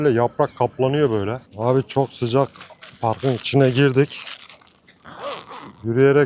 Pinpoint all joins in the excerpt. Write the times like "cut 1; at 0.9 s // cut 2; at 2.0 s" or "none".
cut 1; at 1.4 s